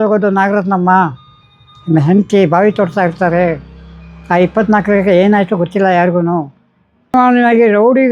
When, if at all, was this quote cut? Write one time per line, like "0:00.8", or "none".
0:07.1